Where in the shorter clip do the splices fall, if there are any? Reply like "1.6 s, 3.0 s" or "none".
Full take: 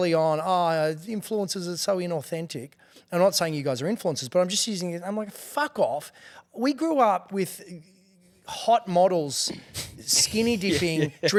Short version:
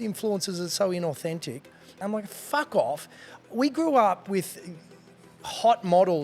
1.9 s